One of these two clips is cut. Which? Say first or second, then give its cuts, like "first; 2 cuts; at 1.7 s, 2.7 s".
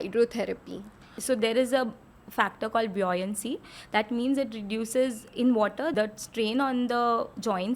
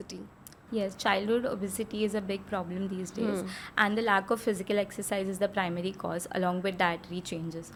first; 1 cut; at 1.2 s